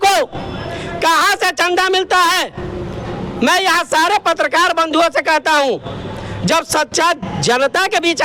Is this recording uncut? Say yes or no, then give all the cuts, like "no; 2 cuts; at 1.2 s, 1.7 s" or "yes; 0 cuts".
yes; 0 cuts